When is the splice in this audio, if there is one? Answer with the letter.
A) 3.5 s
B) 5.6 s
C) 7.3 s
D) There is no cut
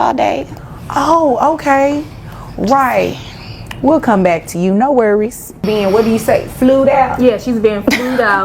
B